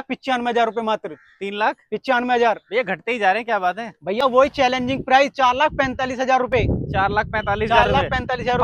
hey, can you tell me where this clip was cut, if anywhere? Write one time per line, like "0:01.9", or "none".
0:04.2